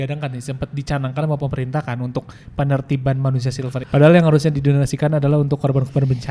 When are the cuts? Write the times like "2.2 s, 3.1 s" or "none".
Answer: 3.7 s